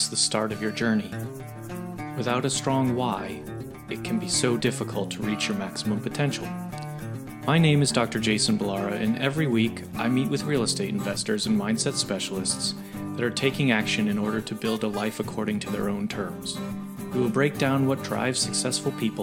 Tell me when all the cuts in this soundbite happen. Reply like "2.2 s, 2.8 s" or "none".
none